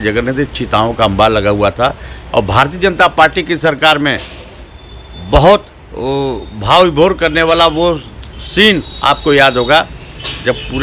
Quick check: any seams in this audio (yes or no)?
no